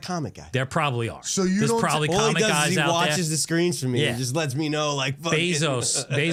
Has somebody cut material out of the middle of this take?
no; 0 cuts

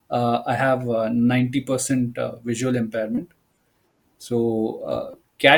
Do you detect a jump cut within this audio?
no; 0 cuts

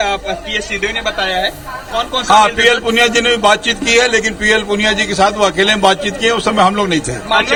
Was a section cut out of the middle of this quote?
no; 0 cuts

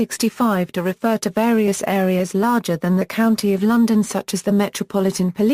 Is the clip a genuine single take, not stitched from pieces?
yes; 0 cuts

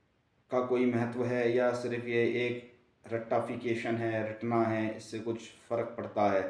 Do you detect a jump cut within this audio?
no; 0 cuts

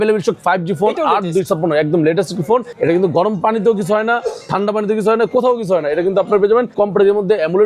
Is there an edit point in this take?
yes; 2 cuts; at 2.7 s, 6.7 s

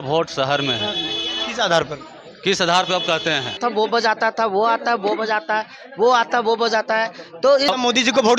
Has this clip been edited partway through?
yes; 2 cuts; at 3.6 s, 7.7 s

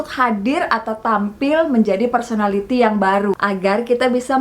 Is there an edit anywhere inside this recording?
yes; 1 cut; at 3.4 s

